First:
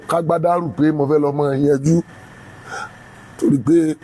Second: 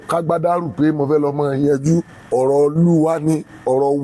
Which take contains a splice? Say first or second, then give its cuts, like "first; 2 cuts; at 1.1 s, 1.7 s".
second; 1 cut; at 2.2 s